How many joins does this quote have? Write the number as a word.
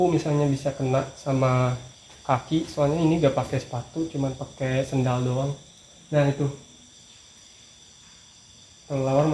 zero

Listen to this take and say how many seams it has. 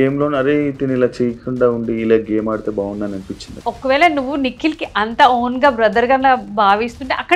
one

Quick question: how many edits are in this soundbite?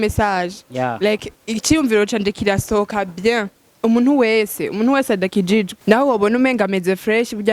two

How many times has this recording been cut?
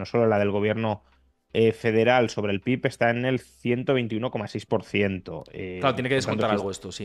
zero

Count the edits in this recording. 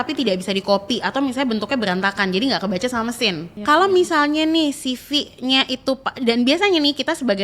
one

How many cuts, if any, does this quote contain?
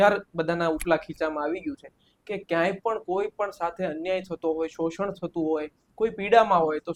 zero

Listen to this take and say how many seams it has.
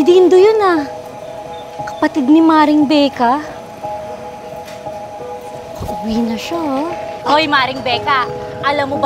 one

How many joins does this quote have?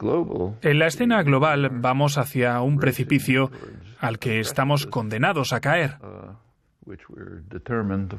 zero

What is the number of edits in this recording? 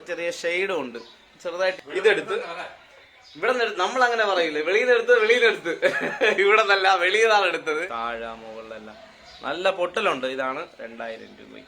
two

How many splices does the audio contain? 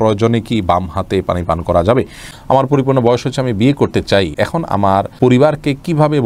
two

